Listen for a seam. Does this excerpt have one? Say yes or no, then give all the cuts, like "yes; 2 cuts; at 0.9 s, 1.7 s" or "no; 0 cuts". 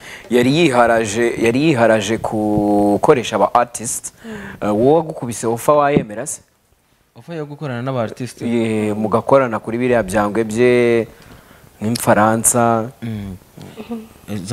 no; 0 cuts